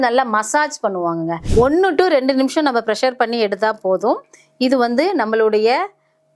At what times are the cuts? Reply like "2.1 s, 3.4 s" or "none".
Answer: 1.4 s